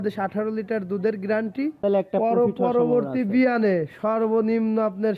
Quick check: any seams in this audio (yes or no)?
yes